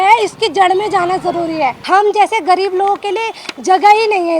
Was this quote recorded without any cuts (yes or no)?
no